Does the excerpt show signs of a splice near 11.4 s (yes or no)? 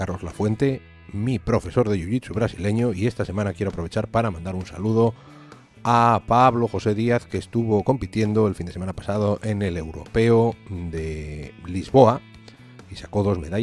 yes